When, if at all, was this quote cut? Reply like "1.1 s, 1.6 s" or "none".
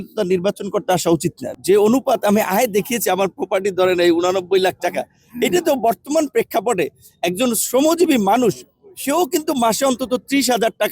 1.4 s